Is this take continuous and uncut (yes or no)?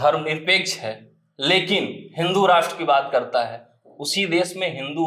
yes